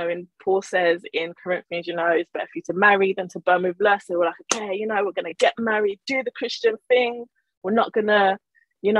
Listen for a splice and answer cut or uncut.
uncut